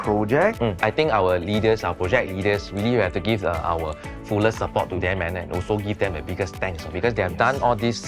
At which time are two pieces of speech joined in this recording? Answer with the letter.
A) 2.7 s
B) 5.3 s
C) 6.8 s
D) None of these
D